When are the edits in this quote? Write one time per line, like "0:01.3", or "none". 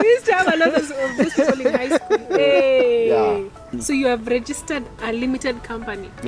0:03.7